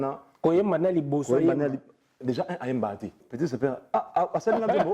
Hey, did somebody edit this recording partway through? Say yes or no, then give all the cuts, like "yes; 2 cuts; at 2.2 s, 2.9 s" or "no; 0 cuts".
yes; 1 cut; at 3.2 s